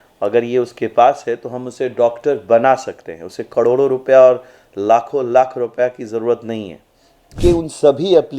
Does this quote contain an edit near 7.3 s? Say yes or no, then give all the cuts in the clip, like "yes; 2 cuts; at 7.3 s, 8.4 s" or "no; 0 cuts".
yes; 1 cut; at 7.3 s